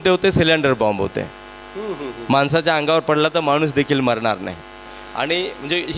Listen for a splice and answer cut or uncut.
cut